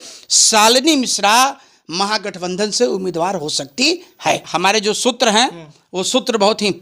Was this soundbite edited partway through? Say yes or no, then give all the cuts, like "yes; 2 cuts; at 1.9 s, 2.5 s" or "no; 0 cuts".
yes; 1 cut; at 4.5 s